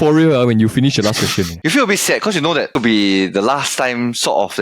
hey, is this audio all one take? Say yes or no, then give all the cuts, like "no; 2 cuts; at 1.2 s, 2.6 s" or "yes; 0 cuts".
no; 2 cuts; at 1.6 s, 2.8 s